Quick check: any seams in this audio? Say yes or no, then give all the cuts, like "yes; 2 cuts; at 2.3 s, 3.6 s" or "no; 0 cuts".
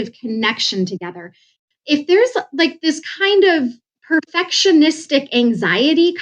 yes; 1 cut; at 1.5 s